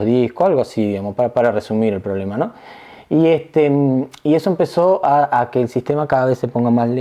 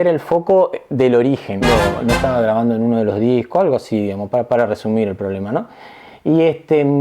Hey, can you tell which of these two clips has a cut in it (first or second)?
second